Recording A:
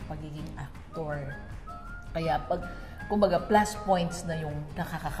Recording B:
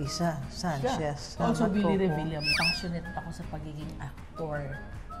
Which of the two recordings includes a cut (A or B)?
B